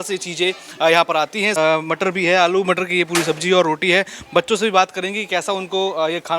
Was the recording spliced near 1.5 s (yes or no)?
yes